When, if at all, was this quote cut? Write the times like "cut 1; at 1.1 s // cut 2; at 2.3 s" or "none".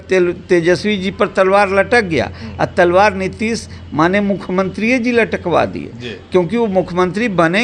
none